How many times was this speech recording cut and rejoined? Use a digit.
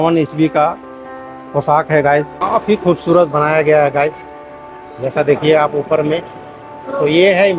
1